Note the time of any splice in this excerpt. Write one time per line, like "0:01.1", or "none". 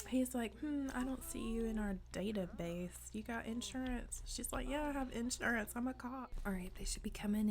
0:06.2